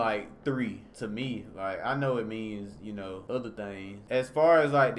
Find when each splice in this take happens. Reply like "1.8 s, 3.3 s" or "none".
0.9 s, 3.2 s, 3.9 s